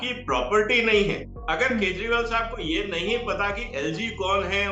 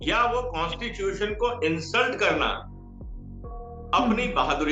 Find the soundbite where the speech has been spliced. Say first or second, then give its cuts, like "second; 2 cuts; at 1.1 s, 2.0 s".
first; 1 cut; at 1.3 s